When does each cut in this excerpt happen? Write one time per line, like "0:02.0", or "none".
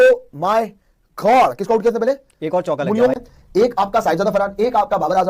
0:03.1